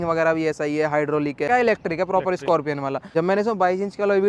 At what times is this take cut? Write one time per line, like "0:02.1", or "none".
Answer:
0:01.5
0:03.0